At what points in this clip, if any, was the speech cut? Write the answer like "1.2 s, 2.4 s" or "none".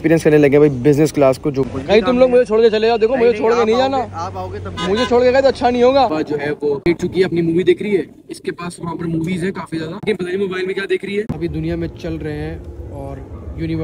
1.6 s, 6.1 s, 11.3 s

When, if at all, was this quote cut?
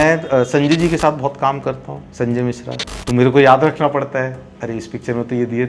2.9 s

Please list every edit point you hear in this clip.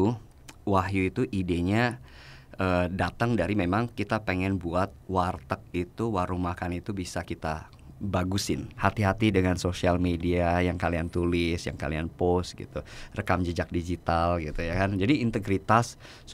8.8 s

